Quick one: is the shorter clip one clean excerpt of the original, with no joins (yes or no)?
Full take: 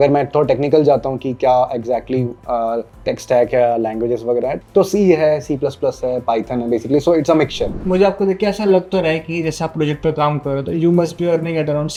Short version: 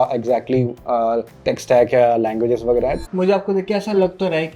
no